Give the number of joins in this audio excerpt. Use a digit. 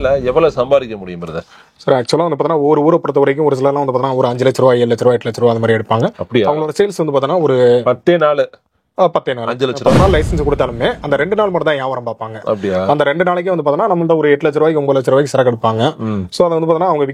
1